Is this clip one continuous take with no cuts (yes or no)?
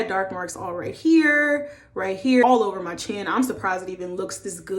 no